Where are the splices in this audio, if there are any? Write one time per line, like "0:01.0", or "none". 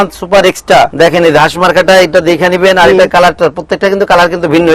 0:00.9